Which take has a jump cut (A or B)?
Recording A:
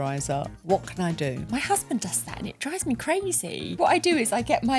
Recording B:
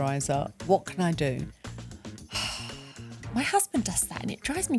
A